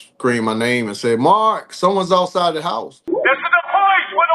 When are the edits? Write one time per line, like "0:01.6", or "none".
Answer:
0:03.1